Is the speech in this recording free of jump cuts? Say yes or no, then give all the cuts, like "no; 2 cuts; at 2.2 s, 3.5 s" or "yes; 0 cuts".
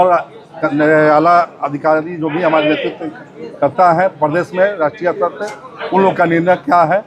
yes; 0 cuts